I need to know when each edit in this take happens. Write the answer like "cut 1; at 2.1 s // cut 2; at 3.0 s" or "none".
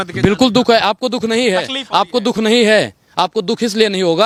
none